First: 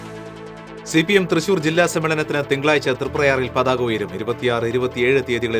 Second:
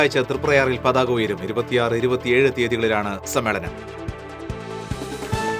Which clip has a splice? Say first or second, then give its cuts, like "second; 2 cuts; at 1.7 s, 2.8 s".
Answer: first; 1 cut; at 0.9 s